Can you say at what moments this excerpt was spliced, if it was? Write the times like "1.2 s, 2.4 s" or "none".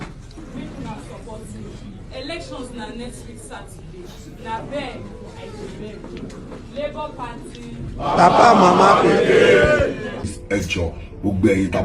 10.2 s